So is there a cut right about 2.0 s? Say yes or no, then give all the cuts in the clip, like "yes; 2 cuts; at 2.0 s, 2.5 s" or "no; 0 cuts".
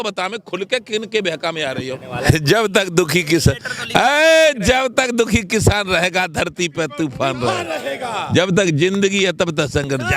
yes; 1 cut; at 2.0 s